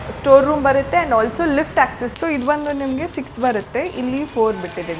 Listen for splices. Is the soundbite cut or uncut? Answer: cut